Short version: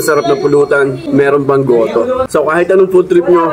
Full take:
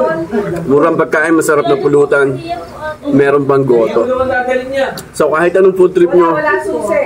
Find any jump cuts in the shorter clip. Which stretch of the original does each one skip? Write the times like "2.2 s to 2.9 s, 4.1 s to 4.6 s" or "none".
2.4 s to 3.0 s, 4.2 s to 5.1 s